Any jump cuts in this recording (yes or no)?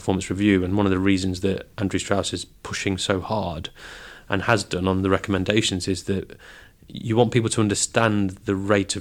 no